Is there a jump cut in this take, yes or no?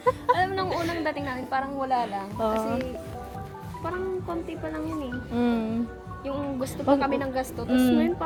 no